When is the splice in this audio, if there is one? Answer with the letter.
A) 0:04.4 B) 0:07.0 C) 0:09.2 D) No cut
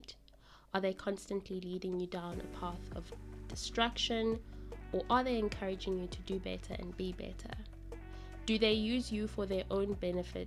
D